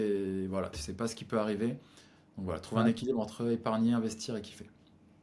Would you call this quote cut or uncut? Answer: uncut